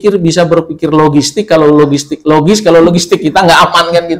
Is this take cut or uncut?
uncut